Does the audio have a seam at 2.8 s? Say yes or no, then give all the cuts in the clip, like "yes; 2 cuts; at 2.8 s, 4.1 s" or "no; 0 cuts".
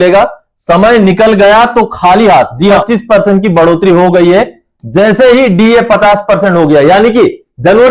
yes; 1 cut; at 2.8 s